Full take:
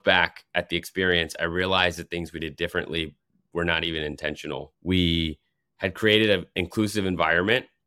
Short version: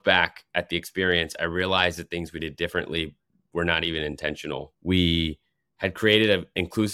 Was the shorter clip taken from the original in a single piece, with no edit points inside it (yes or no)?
yes